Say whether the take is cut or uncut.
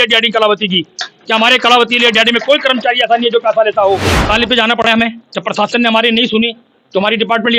cut